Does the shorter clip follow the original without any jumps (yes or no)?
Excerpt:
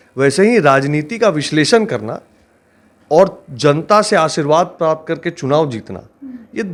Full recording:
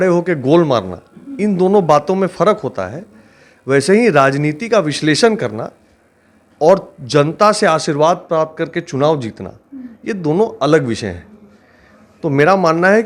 yes